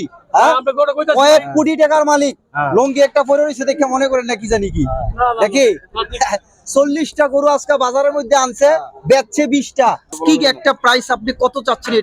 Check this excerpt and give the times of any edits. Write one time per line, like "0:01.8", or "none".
0:10.2